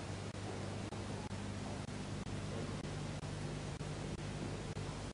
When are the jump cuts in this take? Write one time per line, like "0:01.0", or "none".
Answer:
0:03.1